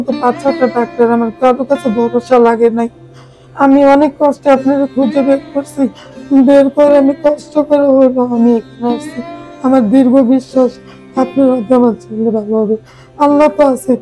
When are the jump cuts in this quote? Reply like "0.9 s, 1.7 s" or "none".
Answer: none